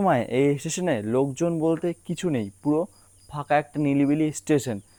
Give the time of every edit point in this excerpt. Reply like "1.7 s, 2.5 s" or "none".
none